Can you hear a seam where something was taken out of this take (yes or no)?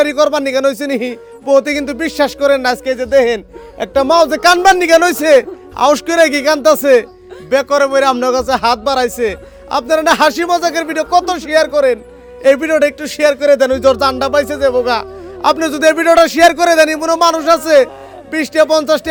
no